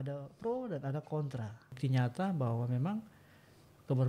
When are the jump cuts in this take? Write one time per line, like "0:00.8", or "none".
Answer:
0:01.7

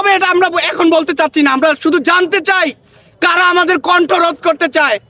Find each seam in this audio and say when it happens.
none

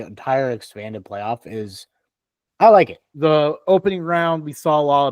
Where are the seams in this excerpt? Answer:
0:03.0

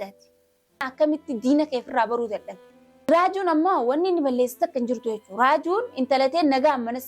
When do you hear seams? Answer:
0:00.8
0:03.1

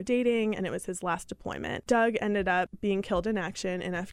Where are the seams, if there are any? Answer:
0:01.7
0:02.7

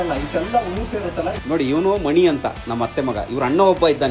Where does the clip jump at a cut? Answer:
0:01.4

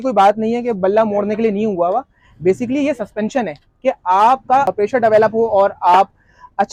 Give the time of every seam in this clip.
none

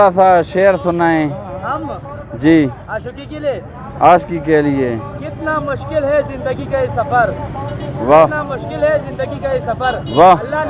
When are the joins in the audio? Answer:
none

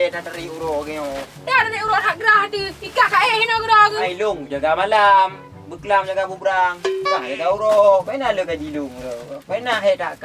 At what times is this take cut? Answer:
none

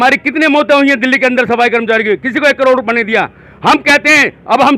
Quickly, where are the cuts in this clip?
none

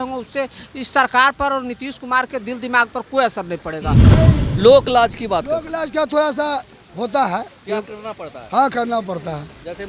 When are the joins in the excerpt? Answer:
0:04.1

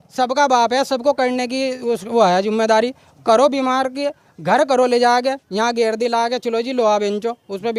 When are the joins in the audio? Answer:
none

